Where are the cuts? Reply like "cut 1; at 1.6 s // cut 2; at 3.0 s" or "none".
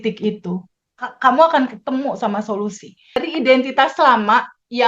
cut 1; at 3.2 s